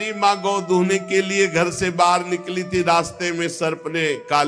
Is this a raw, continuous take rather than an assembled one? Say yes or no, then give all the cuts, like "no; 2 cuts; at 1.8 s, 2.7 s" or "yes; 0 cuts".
yes; 0 cuts